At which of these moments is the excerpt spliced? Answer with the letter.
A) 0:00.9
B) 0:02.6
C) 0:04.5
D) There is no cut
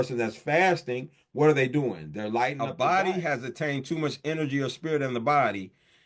B